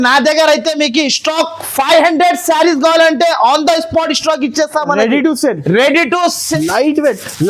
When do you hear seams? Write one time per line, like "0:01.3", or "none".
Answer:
0:06.4